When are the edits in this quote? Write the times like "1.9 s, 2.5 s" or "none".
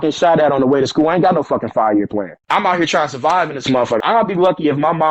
2.4 s, 4.0 s